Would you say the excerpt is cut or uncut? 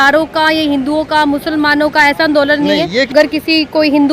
cut